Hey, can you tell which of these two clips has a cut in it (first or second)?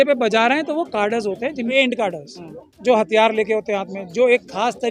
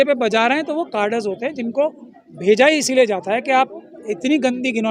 first